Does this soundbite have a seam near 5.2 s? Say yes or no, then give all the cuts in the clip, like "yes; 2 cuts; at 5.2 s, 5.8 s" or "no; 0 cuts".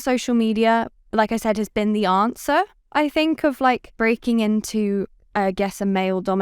no; 2 cuts; at 1.0 s, 3.9 s